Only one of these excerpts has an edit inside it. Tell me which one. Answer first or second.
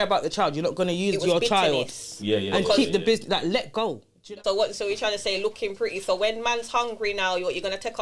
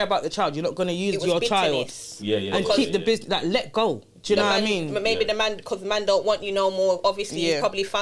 first